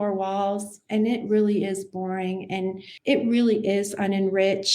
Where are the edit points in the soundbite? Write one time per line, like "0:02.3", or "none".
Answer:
0:02.9